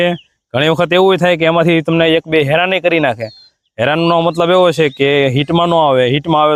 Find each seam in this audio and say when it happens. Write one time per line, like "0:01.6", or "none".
none